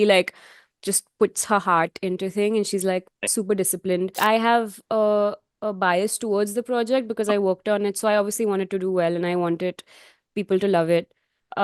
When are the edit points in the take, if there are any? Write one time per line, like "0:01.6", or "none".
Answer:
0:04.2